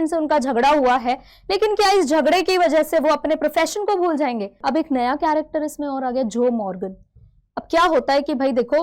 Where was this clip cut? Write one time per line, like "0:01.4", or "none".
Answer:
0:04.6